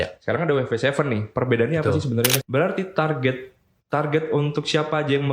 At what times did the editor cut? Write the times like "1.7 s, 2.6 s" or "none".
2.4 s